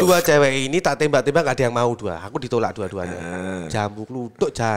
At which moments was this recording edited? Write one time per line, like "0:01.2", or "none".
none